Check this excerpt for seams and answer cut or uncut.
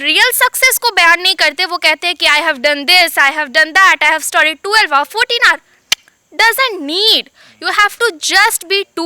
uncut